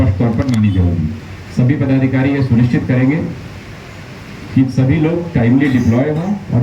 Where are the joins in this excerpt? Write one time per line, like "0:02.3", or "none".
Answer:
none